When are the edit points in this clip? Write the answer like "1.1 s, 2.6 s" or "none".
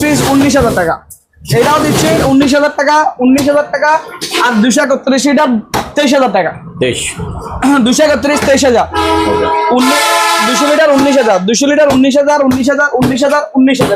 none